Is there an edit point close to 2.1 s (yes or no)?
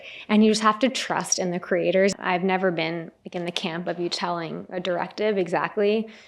yes